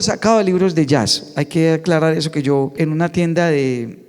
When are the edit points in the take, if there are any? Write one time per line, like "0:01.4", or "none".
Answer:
0:02.7